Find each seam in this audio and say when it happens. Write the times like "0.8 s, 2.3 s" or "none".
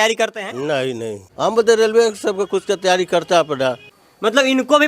1.2 s, 3.9 s